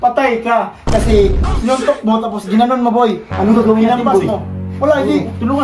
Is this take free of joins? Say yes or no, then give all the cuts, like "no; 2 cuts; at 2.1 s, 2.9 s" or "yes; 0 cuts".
yes; 0 cuts